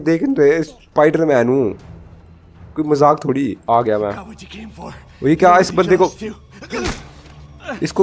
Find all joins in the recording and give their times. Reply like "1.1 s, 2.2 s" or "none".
3.6 s